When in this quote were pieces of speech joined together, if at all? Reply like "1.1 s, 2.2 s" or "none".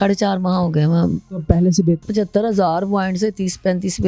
1.2 s, 2.1 s